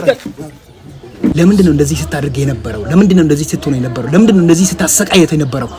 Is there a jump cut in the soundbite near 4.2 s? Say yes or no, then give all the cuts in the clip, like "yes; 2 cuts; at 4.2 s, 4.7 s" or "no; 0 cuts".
no; 1 cut; at 1.3 s